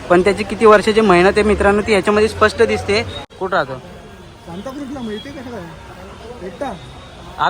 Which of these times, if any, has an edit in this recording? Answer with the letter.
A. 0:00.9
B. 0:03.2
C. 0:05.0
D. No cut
B